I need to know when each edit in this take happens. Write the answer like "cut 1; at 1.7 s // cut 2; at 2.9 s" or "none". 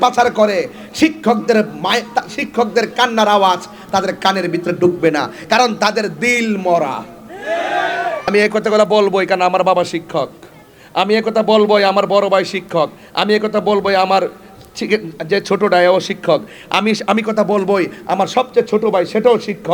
cut 1; at 8.3 s